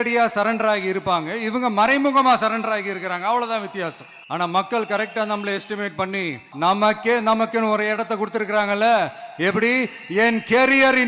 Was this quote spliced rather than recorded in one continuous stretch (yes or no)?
yes